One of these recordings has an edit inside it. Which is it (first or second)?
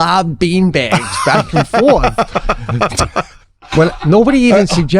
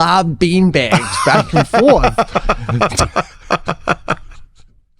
first